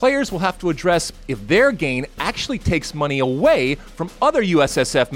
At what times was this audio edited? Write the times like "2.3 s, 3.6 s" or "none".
none